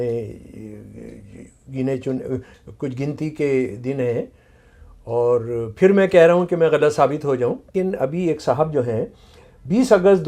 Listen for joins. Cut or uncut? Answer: cut